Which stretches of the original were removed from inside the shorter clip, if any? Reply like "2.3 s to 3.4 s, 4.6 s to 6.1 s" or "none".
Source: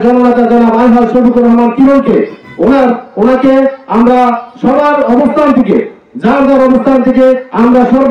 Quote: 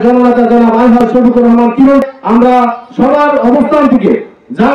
2.1 s to 3.7 s